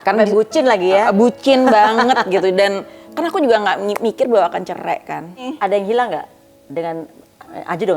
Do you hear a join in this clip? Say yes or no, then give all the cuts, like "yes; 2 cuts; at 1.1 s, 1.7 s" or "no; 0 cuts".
yes; 1 cut; at 5.5 s